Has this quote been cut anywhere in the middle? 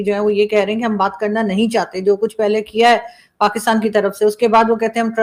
no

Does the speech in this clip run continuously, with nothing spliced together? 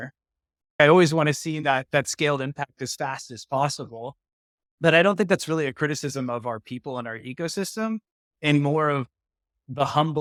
yes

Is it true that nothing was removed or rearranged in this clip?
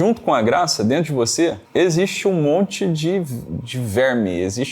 no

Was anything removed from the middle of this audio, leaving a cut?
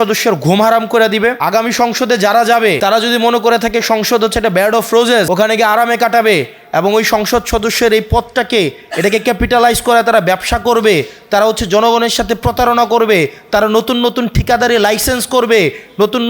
yes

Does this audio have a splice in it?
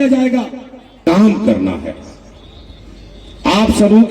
yes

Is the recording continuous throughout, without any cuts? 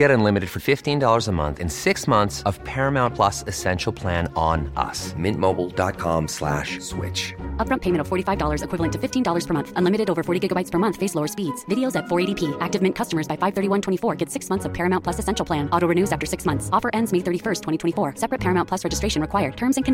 yes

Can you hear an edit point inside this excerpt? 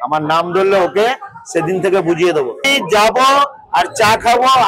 yes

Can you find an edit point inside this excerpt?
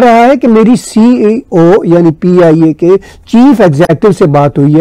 no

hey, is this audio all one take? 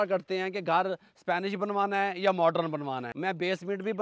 no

